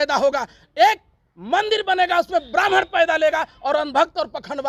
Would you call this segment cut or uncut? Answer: uncut